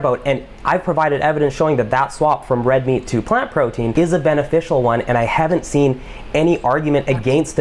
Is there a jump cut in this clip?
yes; 1 cut; at 3.9 s

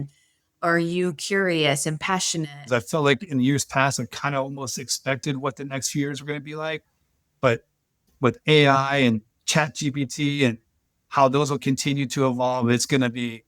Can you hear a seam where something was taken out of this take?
yes; 1 cut; at 2.7 s

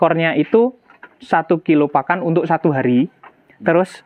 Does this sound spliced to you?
no; 0 cuts

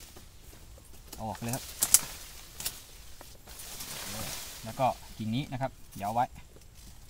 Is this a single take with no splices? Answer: yes; 0 cuts

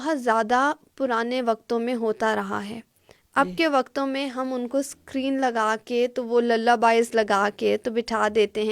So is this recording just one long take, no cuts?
yes; 0 cuts

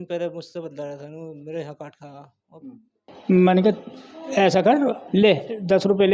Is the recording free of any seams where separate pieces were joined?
no; 2 cuts; at 3.1 s, 5.0 s

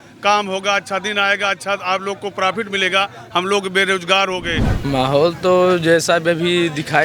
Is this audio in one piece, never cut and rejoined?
no; 1 cut; at 4.7 s

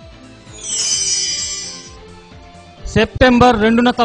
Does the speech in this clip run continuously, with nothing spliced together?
no; 1 cut; at 2.9 s

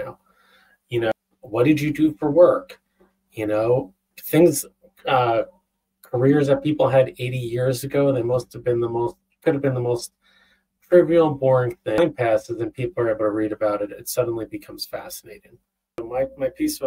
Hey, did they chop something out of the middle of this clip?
yes; 3 cuts; at 1.1 s, 12.0 s, 16.0 s

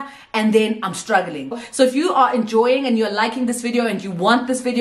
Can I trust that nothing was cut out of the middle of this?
no; 1 cut; at 1.6 s

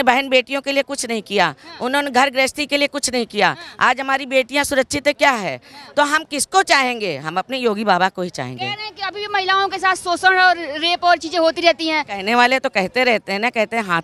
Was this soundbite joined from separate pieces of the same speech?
no; 0 cuts

